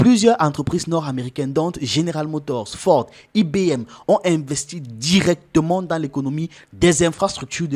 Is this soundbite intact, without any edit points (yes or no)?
yes